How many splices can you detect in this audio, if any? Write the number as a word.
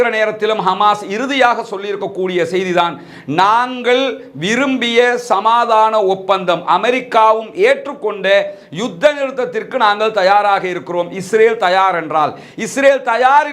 zero